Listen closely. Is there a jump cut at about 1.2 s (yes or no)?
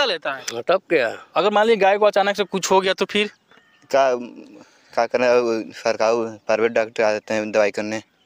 yes